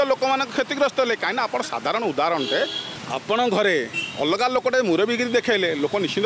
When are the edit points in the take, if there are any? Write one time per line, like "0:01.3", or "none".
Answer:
0:02.9